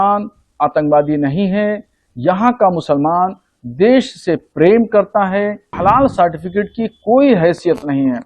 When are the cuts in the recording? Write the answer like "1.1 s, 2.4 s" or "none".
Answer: 5.7 s